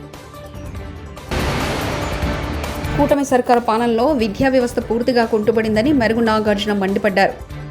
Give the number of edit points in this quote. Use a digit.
0